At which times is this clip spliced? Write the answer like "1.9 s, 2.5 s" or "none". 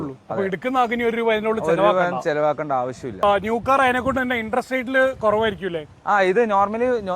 3.2 s